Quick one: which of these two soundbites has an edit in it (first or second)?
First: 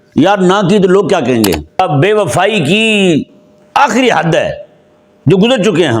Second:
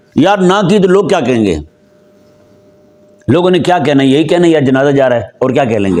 first